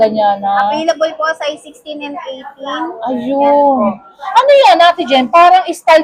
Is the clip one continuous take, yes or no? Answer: yes